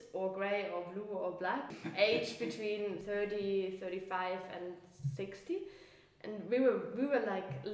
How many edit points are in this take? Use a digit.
2